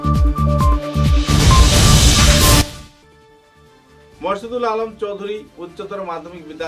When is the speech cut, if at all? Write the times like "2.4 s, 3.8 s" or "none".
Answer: none